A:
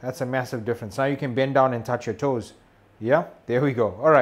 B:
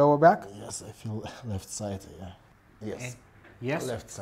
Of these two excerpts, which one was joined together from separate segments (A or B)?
B